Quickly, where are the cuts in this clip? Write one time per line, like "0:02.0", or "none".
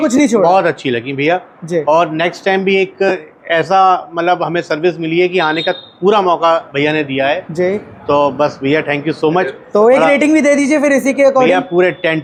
none